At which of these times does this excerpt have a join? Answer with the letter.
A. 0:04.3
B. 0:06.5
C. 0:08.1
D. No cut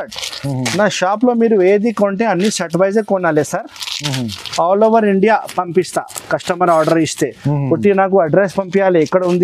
D